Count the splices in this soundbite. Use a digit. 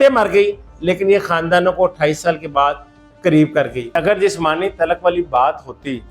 1